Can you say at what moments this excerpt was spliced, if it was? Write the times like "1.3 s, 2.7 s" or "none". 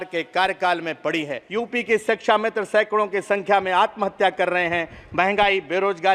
1.4 s